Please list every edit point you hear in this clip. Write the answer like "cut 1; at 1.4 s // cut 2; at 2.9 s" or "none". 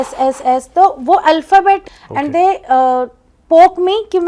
cut 1; at 1.9 s